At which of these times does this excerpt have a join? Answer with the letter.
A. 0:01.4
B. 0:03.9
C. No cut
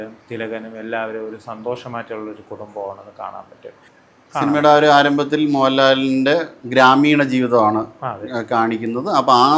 B